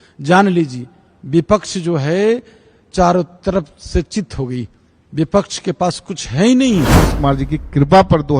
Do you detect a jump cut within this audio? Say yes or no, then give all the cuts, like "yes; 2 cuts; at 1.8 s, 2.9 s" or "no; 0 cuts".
yes; 1 cut; at 7.0 s